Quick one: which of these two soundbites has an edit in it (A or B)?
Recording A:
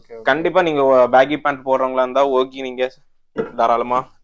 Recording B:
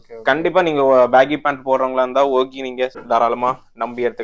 B